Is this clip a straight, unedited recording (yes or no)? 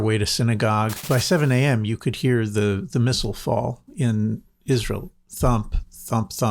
no